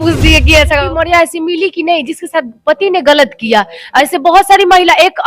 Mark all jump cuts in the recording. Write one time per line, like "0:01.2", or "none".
0:00.9